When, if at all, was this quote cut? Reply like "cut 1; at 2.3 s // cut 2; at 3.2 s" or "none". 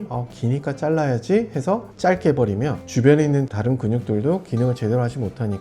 cut 1; at 1.9 s // cut 2; at 2.8 s

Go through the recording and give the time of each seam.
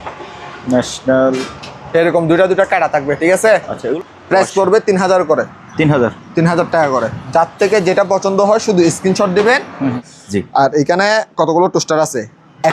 cut 1; at 3.9 s // cut 2; at 10.1 s

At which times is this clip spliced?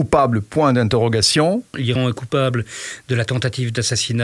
cut 1; at 1.9 s

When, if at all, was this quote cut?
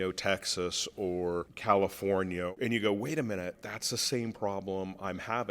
cut 1; at 1.5 s // cut 2; at 2.5 s // cut 3; at 3.5 s

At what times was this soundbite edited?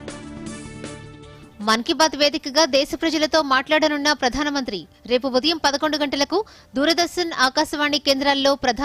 cut 1; at 1.1 s

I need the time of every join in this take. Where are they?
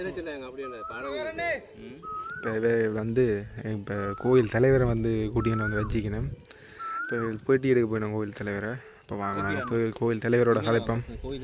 none

